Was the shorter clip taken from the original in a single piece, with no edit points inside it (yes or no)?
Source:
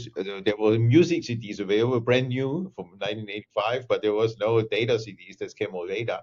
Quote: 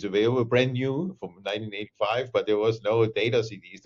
yes